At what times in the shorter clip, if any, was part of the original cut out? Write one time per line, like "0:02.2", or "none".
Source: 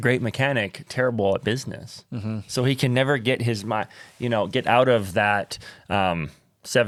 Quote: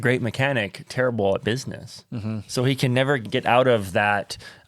0:03.2